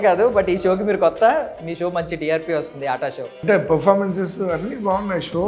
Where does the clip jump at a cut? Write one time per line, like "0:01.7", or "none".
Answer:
0:03.3